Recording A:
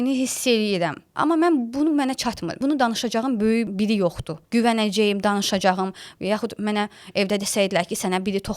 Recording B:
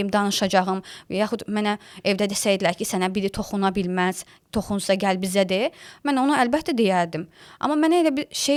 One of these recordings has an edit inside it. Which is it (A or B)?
A